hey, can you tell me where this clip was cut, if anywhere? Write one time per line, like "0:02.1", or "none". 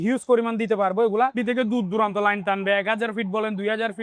0:01.3